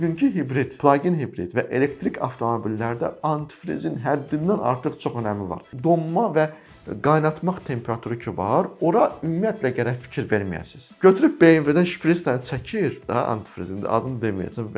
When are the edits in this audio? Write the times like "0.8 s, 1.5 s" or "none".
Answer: 5.7 s, 11.0 s